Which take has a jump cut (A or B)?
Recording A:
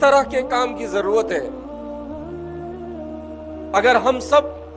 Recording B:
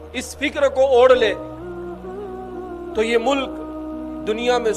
A